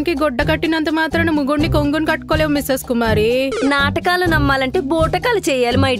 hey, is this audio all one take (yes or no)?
yes